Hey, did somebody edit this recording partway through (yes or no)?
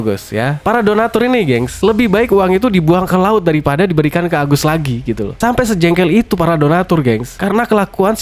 no